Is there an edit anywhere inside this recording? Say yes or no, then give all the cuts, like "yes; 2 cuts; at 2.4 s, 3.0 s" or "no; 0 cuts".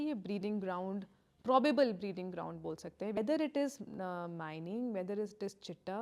yes; 1 cut; at 3.2 s